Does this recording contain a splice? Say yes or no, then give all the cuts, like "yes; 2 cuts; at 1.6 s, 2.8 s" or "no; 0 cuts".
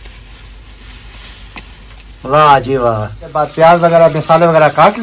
yes; 1 cut; at 3.4 s